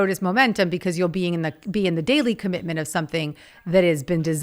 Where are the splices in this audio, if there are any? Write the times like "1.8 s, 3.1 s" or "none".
none

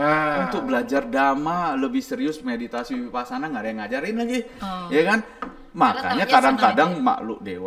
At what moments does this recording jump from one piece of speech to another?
none

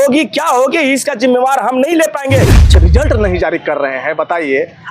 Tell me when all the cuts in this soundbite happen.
2.7 s

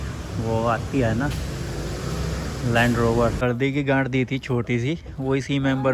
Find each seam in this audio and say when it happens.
3.4 s

